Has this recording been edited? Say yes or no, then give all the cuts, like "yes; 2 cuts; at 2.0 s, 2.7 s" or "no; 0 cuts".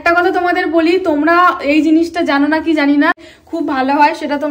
yes; 1 cut; at 3.1 s